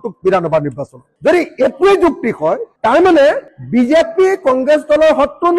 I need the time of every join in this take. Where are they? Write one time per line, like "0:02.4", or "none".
none